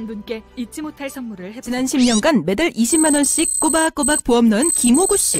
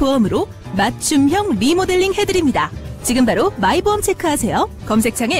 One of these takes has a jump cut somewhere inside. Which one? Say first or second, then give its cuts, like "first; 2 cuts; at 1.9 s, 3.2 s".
first; 1 cut; at 1.6 s